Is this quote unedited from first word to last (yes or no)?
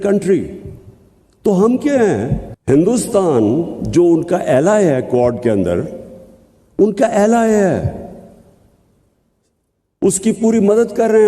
no